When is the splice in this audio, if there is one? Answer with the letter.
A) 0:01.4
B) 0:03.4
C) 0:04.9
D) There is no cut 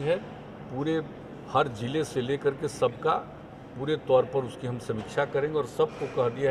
D